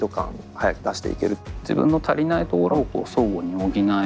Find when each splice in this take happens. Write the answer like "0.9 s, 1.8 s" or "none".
1.1 s, 2.7 s